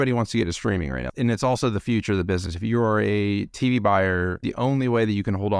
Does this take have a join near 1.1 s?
yes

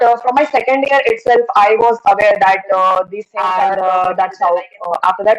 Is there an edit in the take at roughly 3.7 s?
yes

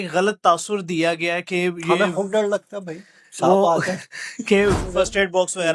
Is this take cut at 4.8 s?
yes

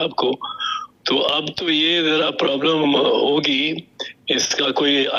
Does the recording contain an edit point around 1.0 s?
no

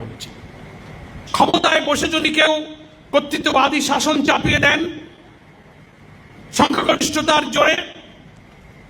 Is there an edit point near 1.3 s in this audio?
yes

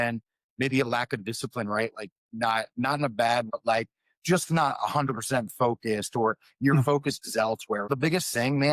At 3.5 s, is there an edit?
yes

